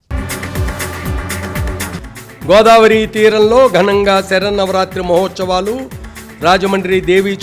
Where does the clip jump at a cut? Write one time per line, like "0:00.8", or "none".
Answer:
none